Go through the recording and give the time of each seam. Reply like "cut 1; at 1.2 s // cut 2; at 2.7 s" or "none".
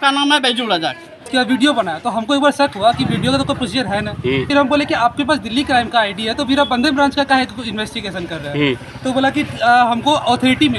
cut 1; at 1.2 s // cut 2; at 4.5 s